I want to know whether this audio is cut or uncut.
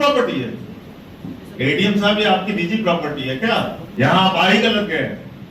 cut